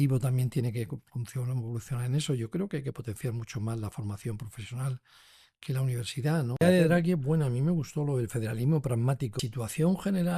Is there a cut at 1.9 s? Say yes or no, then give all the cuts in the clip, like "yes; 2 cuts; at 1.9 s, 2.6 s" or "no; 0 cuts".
no; 2 cuts; at 6.6 s, 9.4 s